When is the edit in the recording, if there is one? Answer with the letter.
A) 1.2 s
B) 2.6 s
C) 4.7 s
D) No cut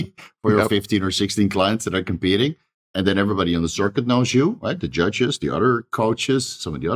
D